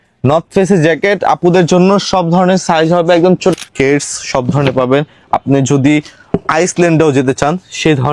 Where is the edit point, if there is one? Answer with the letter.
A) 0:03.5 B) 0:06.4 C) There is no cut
A